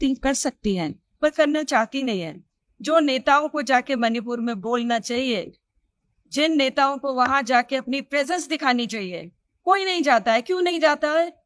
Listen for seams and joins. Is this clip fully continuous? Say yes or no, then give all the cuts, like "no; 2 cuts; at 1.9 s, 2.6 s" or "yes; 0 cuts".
yes; 0 cuts